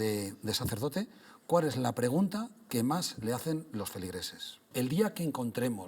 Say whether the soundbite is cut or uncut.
cut